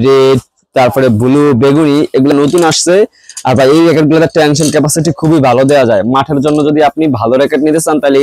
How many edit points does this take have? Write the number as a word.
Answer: zero